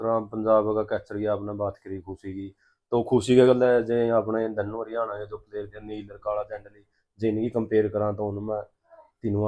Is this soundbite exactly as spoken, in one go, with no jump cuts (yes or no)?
yes